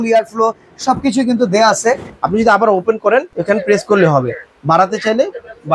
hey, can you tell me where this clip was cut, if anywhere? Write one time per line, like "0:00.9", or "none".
0:02.1